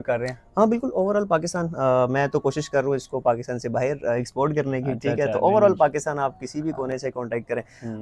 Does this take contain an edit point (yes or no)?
no